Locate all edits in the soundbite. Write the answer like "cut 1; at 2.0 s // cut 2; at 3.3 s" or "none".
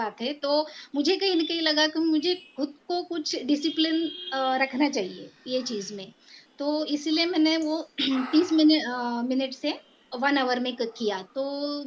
none